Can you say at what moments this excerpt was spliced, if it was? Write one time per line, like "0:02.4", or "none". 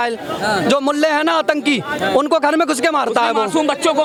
none